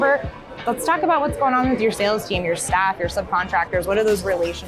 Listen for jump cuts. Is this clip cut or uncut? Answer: uncut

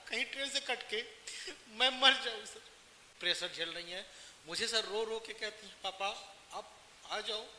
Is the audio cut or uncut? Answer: cut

